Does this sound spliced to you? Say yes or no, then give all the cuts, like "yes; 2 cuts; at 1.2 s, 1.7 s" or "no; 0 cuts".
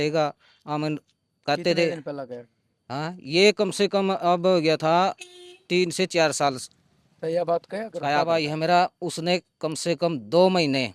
yes; 1 cut; at 8.2 s